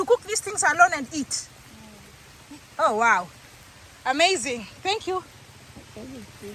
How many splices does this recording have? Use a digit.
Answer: 0